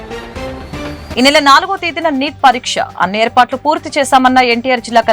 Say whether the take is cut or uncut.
cut